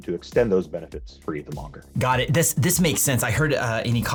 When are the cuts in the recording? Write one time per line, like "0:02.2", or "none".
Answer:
none